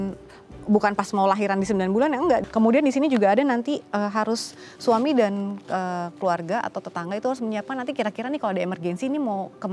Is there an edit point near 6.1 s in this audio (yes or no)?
no